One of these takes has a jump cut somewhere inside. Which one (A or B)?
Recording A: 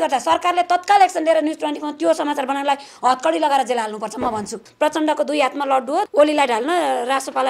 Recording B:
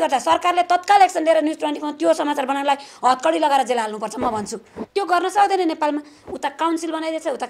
A